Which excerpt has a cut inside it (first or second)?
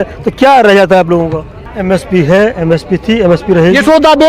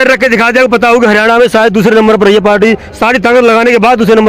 first